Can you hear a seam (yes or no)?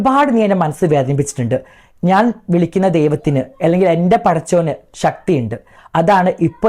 no